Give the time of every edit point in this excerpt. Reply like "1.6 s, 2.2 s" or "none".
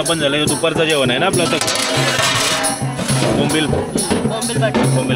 none